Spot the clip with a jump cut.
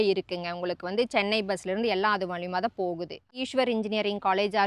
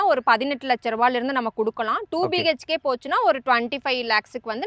first; 1 cut; at 3.4 s

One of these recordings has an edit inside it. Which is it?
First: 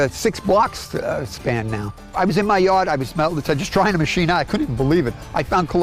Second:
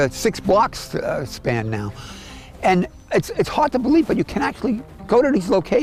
first; 1 cut; at 2.1 s

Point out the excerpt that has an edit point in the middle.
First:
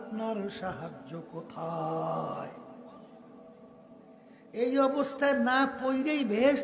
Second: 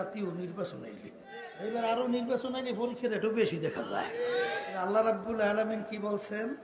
second; 2 cuts; at 1.5 s, 4.6 s

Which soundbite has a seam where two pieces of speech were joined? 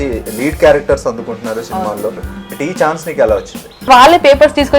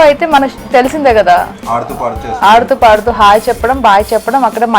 first; 2 cuts; at 2.3 s, 3.9 s

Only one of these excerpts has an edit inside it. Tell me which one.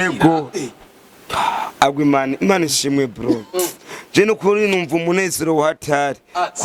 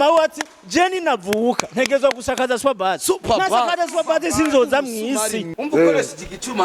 second; 1 cut; at 5.6 s

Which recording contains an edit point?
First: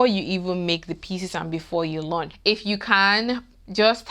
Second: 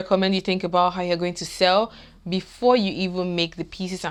first; 1 cut; at 2.3 s

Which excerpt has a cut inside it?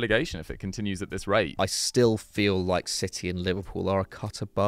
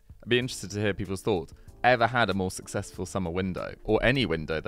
first; 1 cut; at 1.5 s

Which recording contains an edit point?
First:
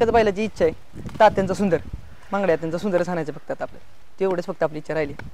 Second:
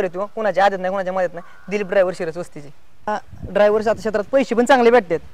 second; 1 cut; at 3.1 s

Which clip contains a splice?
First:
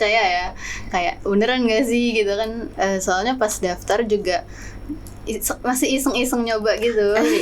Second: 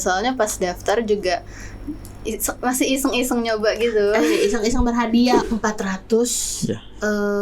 second; 1 cut; at 5.4 s

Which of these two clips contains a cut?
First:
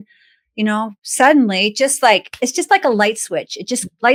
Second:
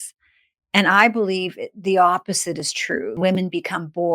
second; 1 cut; at 3.2 s

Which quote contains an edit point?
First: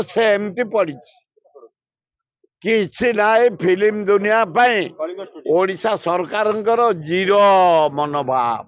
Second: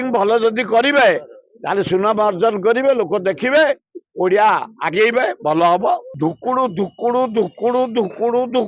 second; 1 cut; at 6.1 s

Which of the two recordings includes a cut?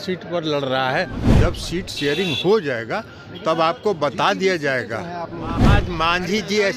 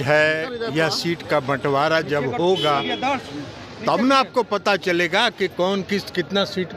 first; 2 cuts; at 1.2 s, 5.6 s

